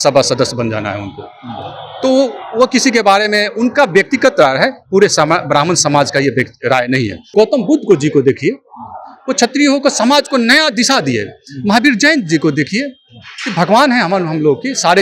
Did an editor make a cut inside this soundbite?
yes; 1 cut; at 7.3 s

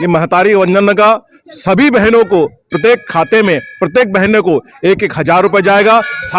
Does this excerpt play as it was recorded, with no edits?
yes; 0 cuts

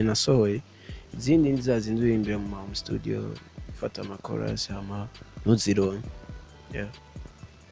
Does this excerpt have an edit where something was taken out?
no; 0 cuts

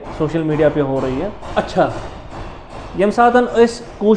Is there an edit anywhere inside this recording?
no; 0 cuts

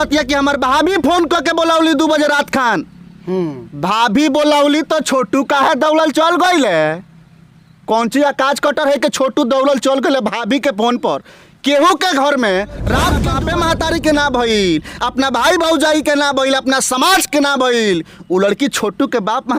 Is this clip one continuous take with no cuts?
no; 1 cut; at 13.3 s

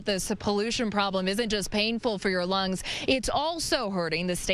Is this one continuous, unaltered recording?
yes; 0 cuts

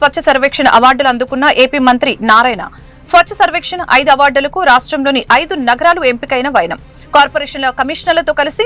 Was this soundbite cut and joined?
no; 0 cuts

